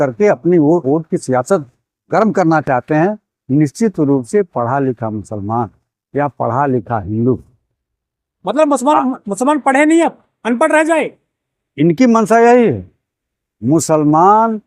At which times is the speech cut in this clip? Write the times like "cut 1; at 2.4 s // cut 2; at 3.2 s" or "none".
none